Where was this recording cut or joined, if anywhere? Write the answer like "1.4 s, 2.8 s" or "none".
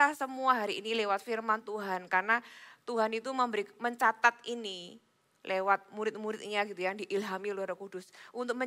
none

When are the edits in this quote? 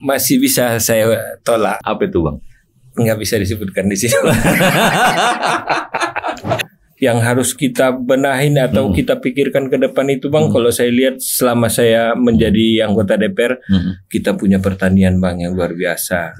1.8 s, 6.6 s

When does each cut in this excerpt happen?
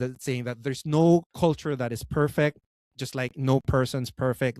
1.3 s

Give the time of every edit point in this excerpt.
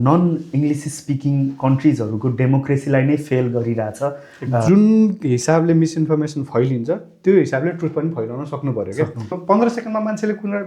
4.6 s, 9.4 s

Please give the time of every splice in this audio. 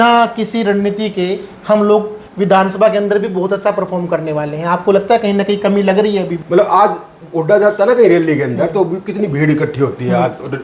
6.4 s

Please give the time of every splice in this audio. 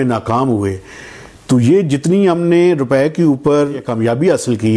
3.9 s

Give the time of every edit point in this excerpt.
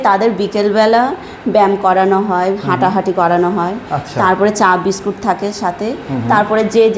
none

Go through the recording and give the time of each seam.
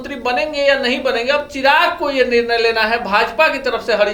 none

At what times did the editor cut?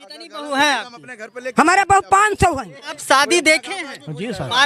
2.9 s

